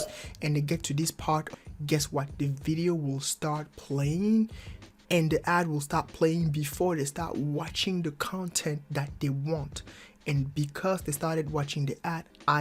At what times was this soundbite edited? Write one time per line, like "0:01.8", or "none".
0:01.6

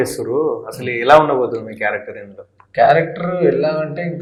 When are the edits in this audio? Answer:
none

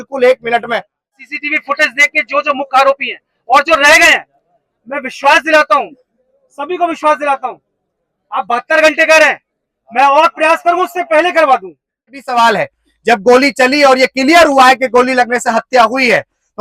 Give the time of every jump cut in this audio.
0:01.2
0:12.2

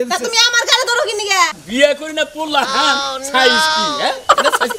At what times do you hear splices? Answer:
0:01.6

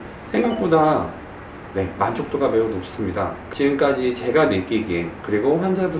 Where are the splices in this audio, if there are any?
0:03.4

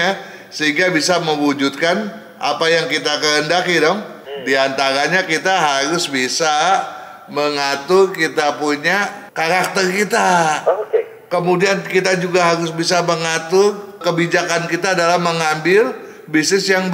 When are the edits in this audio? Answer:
0:04.1

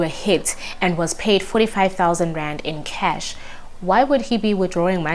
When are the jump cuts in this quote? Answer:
none

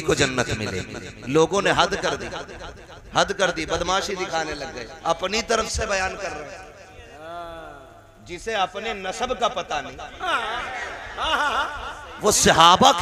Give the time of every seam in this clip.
none

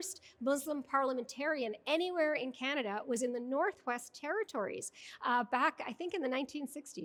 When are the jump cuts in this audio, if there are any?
none

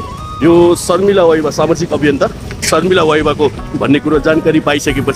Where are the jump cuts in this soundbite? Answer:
0:03.7

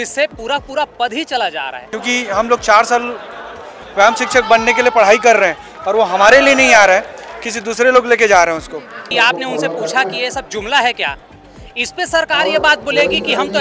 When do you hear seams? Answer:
0:01.9
0:09.1

